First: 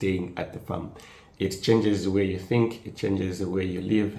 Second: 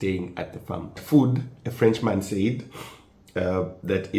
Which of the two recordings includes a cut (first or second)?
second